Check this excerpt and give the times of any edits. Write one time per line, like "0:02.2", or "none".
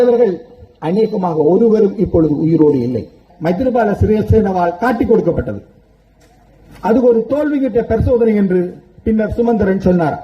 0:03.3